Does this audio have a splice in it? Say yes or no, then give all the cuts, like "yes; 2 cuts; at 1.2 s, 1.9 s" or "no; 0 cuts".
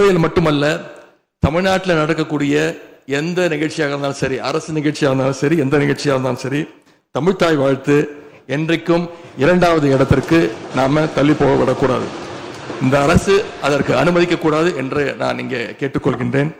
no; 0 cuts